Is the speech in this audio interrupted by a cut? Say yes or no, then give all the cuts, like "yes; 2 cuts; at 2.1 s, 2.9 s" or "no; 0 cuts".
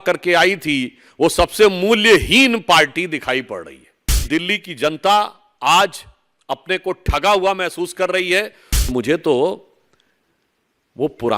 yes; 2 cuts; at 4.3 s, 8.9 s